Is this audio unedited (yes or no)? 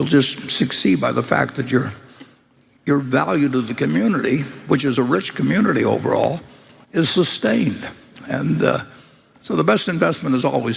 yes